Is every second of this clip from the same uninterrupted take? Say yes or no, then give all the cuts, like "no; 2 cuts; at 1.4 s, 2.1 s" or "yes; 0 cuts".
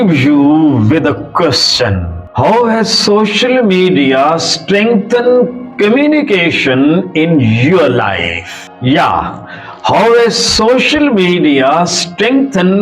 yes; 0 cuts